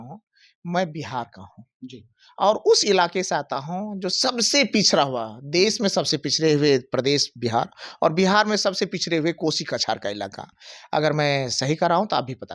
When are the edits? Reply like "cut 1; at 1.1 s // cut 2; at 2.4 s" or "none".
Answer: none